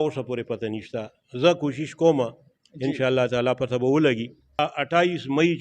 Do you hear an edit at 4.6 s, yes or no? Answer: yes